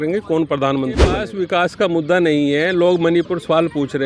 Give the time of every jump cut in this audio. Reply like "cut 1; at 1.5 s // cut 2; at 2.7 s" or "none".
cut 1; at 1.2 s